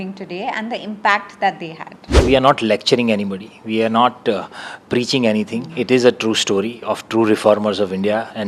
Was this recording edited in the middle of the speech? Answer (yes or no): yes